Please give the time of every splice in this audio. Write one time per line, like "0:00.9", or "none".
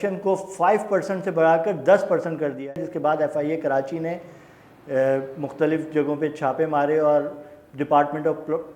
0:02.8